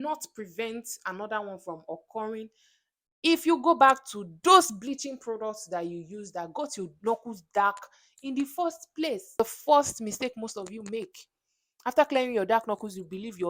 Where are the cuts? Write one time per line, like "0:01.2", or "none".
0:09.4